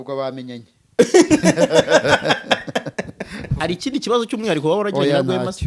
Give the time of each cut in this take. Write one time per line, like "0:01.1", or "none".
0:03.5